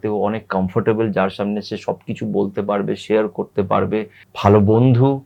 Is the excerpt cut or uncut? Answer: cut